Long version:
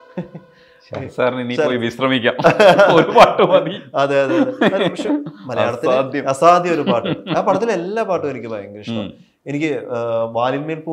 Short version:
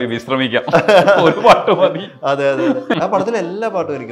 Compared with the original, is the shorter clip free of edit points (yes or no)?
no